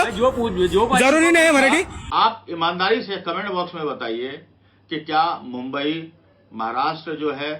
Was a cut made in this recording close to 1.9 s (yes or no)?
yes